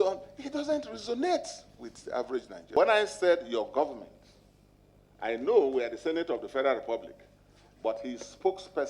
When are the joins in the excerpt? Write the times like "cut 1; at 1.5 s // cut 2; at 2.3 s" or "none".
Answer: cut 1; at 2.8 s